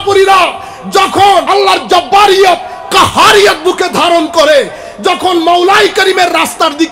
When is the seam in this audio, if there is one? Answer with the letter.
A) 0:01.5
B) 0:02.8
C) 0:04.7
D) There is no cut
A